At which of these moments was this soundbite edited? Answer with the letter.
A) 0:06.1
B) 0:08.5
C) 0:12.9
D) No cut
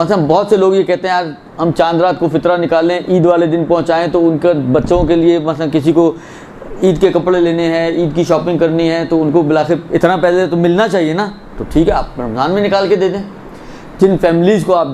B